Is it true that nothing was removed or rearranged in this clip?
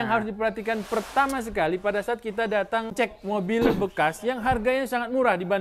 no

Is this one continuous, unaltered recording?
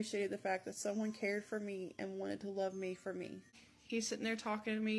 no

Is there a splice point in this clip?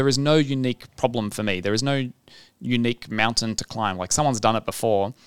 no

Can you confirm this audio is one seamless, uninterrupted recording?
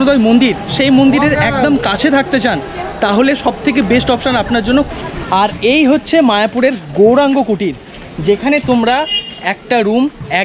no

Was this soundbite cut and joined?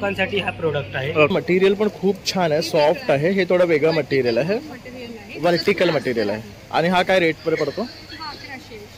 yes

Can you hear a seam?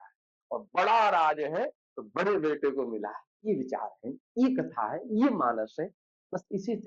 no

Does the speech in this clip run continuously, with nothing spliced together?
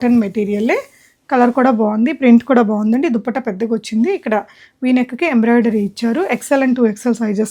yes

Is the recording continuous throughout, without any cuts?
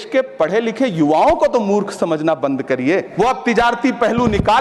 no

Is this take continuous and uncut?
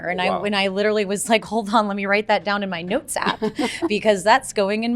yes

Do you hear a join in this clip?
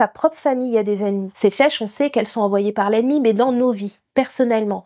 yes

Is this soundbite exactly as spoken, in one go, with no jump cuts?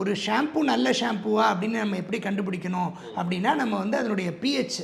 yes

